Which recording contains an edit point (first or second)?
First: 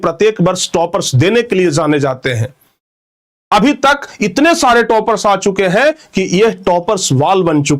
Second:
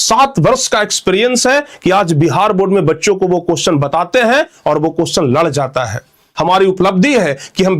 second